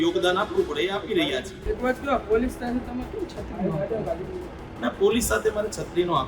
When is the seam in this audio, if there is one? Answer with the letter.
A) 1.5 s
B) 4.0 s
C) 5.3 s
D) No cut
A